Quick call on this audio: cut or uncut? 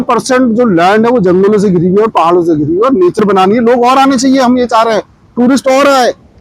cut